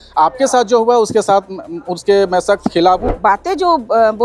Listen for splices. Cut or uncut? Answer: cut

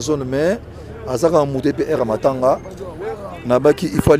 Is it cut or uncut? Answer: uncut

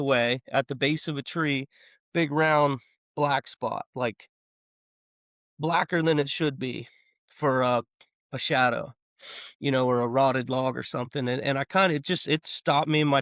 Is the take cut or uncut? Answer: uncut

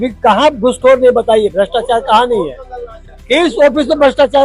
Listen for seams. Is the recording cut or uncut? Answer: uncut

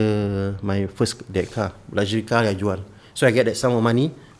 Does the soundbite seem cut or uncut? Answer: uncut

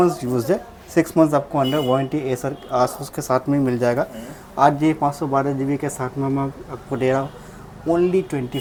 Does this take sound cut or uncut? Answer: uncut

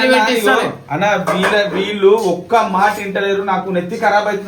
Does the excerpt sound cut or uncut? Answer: uncut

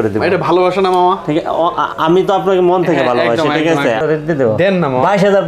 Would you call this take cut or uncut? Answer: cut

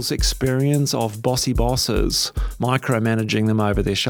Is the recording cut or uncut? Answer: uncut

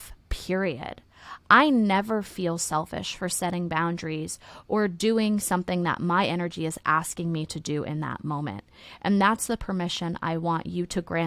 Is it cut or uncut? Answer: uncut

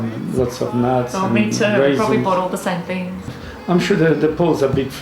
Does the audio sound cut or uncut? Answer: cut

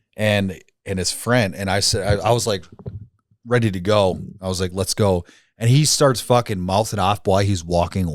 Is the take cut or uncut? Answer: uncut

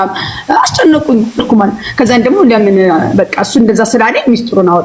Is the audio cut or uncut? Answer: cut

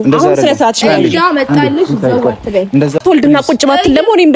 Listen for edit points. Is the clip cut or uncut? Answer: cut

